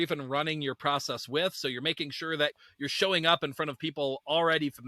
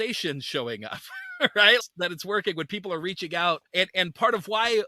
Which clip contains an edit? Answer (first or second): second